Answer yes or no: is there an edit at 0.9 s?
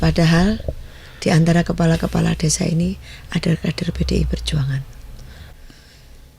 no